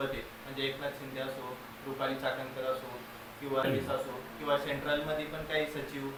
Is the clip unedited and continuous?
yes; 0 cuts

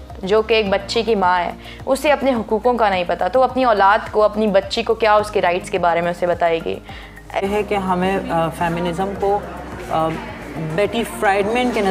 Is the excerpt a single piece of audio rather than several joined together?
no; 1 cut; at 7.4 s

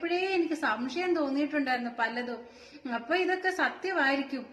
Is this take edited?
no; 0 cuts

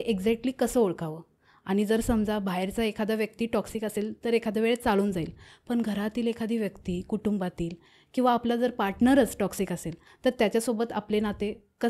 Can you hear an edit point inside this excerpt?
no; 0 cuts

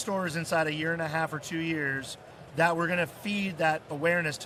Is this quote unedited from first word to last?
yes; 0 cuts

